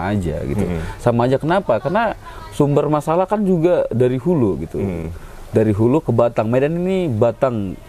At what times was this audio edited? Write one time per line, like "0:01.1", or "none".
none